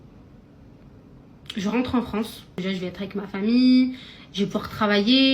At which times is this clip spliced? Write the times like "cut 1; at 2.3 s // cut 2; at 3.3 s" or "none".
cut 1; at 2.5 s